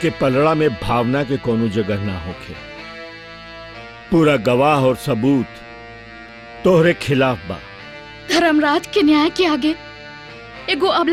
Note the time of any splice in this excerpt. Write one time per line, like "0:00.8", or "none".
none